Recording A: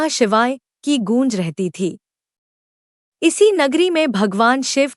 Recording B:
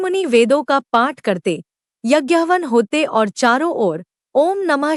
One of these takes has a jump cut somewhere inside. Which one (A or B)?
A